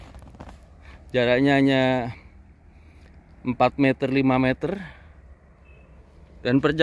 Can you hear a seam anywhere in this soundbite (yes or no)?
no